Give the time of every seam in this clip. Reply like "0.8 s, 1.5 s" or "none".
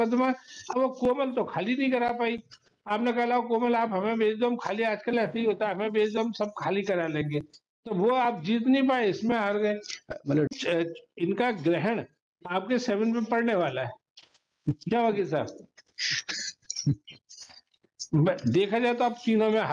10.5 s